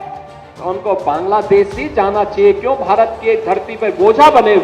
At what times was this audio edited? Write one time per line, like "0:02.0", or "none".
none